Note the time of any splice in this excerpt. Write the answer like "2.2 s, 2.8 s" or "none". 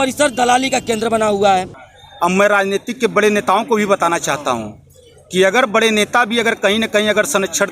1.8 s

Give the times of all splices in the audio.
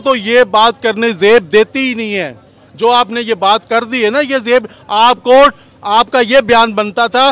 none

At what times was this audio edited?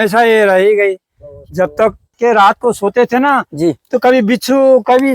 2.1 s

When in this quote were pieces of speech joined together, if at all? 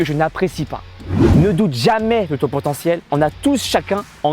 1.1 s

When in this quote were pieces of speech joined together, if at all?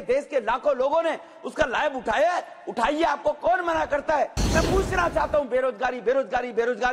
4.4 s

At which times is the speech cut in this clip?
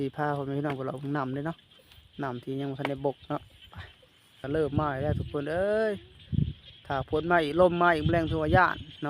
4.4 s

